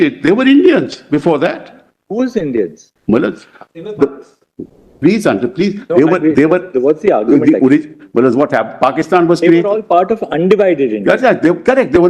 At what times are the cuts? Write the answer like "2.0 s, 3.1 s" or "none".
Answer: 2.9 s